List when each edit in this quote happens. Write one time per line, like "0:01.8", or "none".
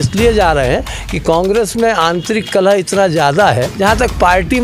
0:03.7